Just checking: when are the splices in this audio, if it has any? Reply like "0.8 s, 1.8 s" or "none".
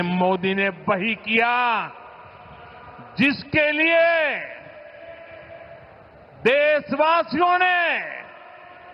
none